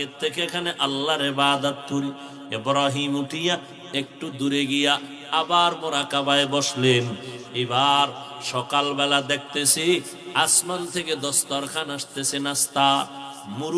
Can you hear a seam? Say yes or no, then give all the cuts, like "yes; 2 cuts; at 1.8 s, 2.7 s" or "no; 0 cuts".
no; 0 cuts